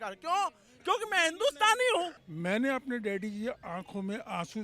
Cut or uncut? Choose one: cut